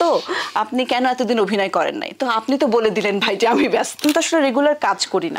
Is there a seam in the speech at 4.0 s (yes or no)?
yes